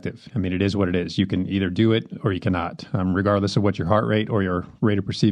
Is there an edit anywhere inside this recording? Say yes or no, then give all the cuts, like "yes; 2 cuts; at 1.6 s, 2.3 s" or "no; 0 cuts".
no; 0 cuts